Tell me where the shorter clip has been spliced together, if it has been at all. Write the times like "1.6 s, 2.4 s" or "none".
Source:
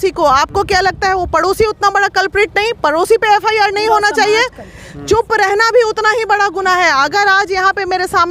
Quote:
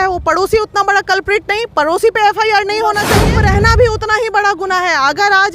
3.2 s